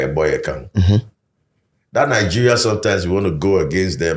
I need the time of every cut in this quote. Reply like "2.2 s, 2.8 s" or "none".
none